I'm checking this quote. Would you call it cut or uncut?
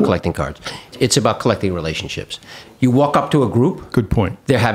cut